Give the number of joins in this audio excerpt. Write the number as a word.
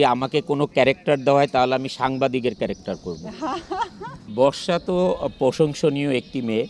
one